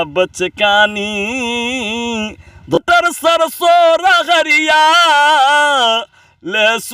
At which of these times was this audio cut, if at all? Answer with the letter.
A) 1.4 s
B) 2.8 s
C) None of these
B